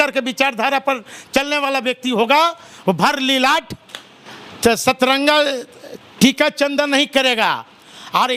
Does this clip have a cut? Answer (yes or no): no